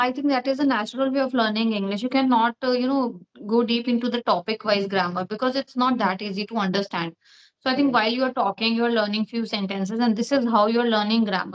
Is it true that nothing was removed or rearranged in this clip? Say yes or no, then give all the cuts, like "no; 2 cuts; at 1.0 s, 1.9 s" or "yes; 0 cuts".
yes; 0 cuts